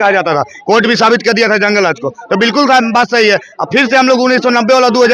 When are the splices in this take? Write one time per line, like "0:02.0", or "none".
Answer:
none